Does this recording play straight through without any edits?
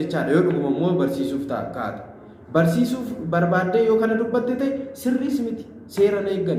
yes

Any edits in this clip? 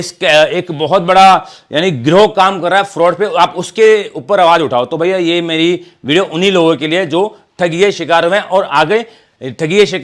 no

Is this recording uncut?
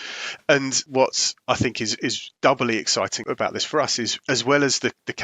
no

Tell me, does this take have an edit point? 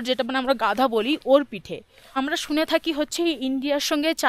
yes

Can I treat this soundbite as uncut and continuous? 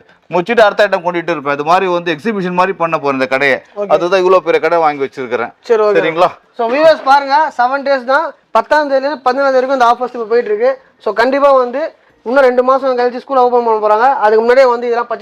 yes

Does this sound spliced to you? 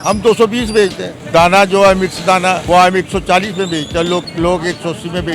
yes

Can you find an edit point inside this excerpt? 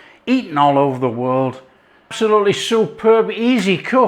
yes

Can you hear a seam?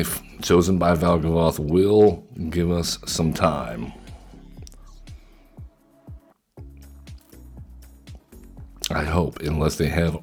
no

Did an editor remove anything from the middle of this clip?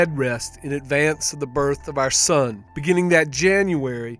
yes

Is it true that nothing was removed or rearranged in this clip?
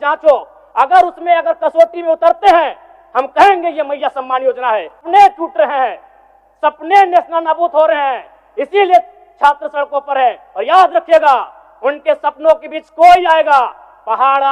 no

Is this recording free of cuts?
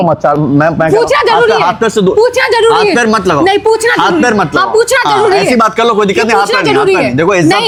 yes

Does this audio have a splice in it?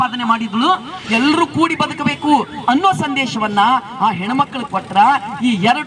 yes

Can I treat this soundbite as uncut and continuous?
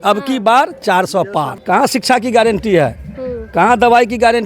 no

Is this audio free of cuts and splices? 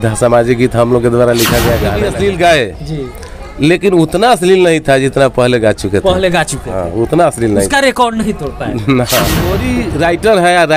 no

